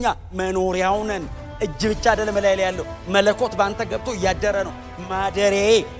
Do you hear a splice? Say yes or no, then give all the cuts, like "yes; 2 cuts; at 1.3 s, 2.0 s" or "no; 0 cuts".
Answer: no; 0 cuts